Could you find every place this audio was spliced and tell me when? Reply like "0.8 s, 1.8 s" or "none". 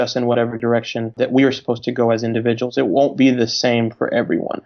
1.1 s